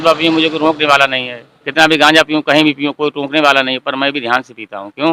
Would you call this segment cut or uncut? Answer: uncut